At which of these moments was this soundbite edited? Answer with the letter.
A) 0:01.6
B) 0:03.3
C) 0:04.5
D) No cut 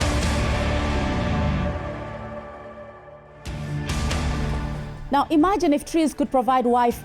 B